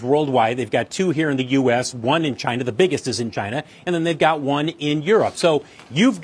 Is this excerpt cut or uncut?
uncut